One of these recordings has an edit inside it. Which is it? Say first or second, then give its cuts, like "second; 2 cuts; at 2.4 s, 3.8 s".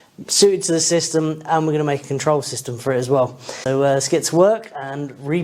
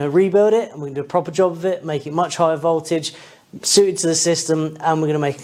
first; 1 cut; at 3.5 s